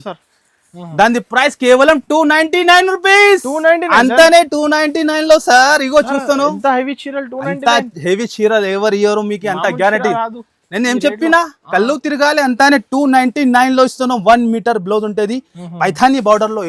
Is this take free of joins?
yes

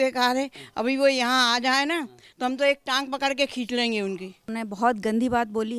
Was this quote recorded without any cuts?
no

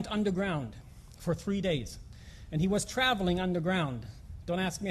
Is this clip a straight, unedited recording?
no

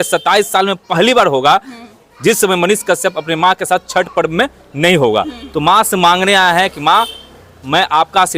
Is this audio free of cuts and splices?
yes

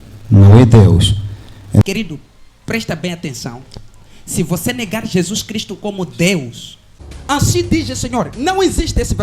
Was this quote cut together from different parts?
yes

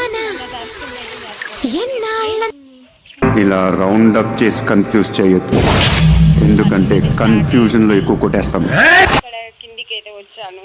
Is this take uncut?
no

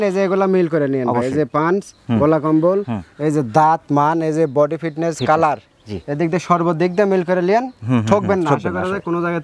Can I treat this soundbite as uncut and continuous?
yes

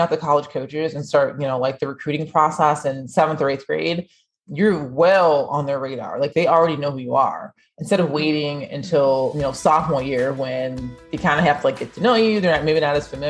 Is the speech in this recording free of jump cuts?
yes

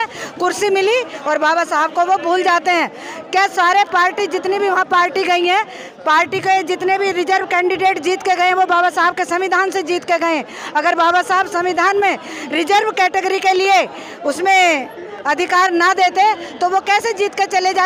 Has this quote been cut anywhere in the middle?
no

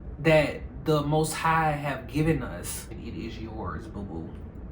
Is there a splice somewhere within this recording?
yes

